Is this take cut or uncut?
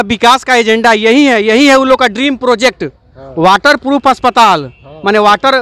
uncut